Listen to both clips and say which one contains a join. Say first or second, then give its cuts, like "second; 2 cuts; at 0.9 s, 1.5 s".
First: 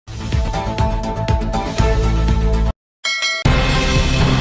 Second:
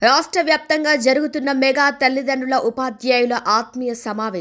first; 1 cut; at 3.4 s